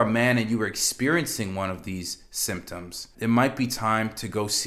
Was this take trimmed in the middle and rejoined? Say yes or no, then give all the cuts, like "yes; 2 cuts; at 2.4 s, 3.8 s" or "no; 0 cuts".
yes; 1 cut; at 3.1 s